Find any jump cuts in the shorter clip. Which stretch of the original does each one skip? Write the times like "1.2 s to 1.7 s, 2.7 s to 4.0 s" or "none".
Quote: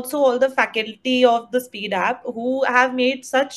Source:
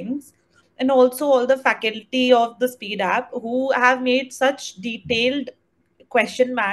none